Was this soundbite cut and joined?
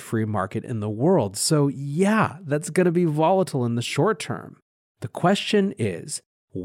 no; 0 cuts

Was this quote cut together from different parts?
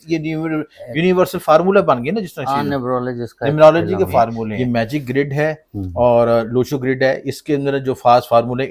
yes; 1 cut; at 4.5 s

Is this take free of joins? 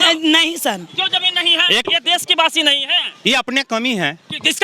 no; 1 cut; at 1.8 s

